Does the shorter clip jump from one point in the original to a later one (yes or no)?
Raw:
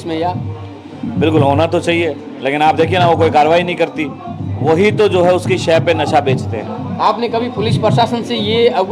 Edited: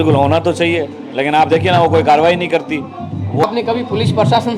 yes